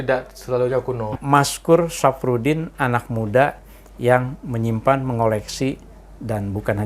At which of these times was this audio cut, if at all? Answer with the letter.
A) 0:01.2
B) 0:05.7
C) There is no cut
A